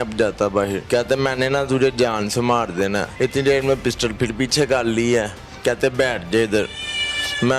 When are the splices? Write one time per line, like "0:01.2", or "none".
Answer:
0:00.8
0:03.1